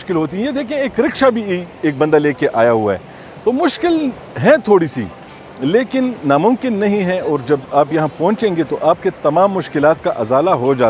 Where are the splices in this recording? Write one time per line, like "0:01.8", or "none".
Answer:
none